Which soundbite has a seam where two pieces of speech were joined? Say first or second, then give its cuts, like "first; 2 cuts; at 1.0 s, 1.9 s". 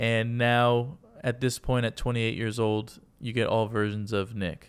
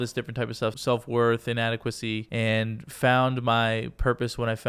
second; 2 cuts; at 0.8 s, 2.2 s